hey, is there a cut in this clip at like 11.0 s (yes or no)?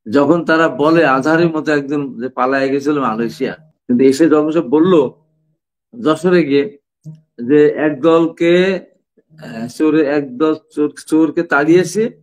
no